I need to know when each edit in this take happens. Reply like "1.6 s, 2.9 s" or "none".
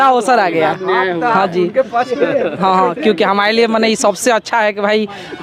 none